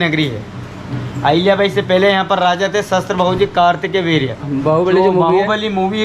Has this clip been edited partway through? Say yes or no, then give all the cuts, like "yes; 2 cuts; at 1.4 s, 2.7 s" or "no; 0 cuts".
yes; 1 cut; at 4.4 s